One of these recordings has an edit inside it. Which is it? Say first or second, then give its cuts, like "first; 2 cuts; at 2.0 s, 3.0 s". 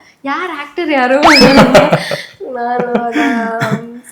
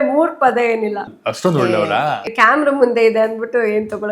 second; 2 cuts; at 1.1 s, 2.3 s